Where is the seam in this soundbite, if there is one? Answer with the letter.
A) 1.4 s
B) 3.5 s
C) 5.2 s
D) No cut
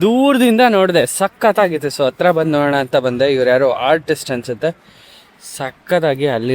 D